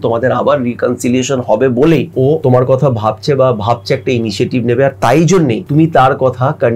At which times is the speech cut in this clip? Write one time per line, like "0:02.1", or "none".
0:02.2
0:05.6